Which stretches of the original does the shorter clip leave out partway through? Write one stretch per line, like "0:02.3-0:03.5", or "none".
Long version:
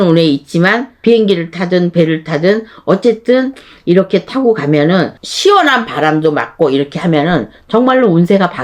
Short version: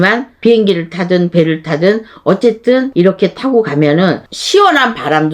0:03.5-0:03.8